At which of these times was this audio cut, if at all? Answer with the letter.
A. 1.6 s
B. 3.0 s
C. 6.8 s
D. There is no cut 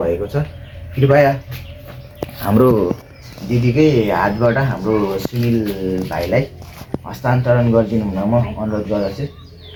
D